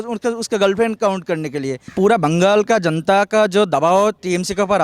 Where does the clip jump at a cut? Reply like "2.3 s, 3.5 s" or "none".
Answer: 1.8 s